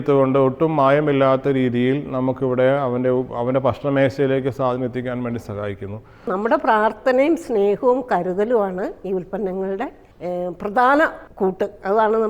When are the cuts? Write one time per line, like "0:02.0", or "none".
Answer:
0:06.2
0:10.1
0:11.2